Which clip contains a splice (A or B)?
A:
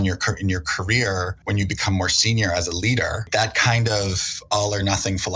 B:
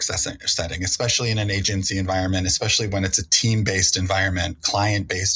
A